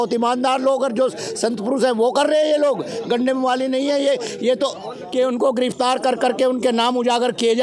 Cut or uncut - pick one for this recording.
cut